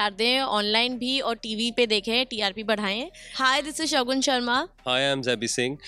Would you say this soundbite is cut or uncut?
cut